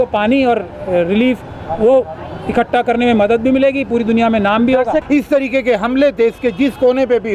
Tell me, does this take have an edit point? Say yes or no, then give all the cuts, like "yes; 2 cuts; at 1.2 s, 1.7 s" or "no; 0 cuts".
yes; 1 cut; at 5.0 s